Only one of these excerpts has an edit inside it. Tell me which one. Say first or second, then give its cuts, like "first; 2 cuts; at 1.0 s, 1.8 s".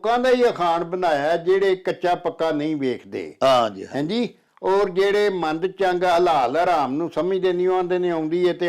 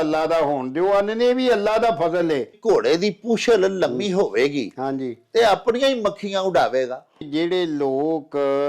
second; 2 cuts; at 2.6 s, 7.2 s